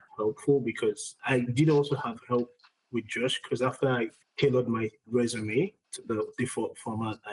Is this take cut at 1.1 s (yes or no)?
yes